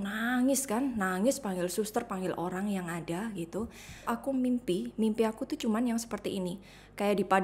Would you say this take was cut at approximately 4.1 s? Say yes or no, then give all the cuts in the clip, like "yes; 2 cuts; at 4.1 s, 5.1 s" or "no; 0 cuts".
yes; 1 cut; at 4.1 s